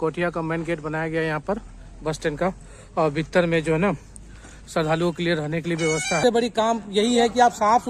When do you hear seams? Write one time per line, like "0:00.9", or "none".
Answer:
0:06.2